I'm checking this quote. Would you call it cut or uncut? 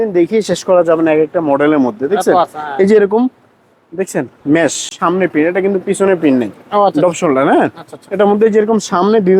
cut